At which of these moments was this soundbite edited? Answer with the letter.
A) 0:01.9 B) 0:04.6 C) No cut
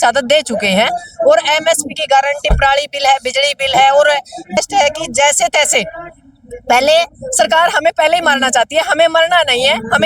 B